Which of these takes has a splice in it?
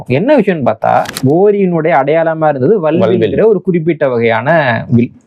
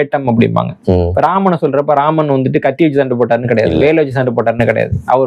first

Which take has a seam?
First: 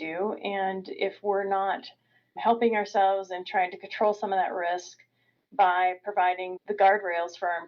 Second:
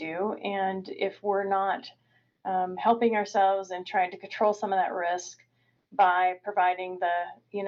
first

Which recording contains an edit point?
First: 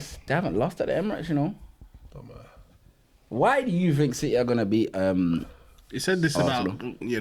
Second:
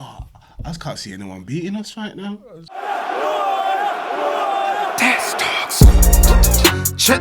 second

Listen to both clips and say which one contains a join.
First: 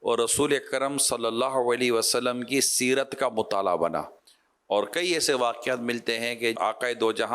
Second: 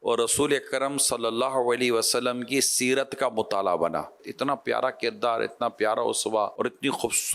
second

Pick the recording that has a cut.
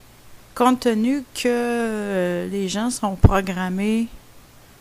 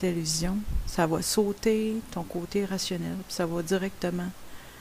second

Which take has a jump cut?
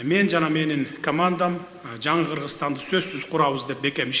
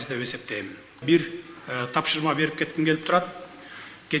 second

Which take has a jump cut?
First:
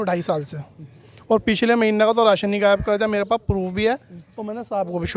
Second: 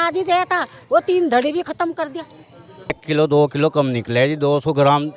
second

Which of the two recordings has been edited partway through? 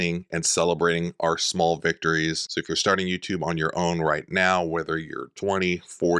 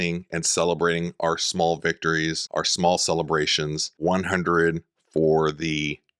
first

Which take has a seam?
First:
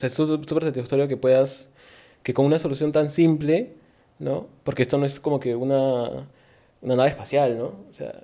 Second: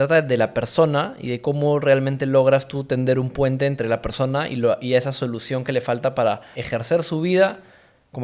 second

